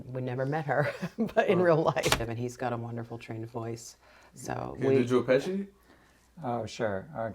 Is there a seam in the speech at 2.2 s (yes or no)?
yes